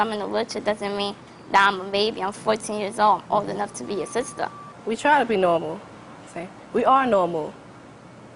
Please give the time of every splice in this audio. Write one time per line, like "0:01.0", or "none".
0:02.9